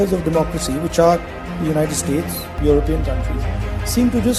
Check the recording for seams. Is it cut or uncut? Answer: uncut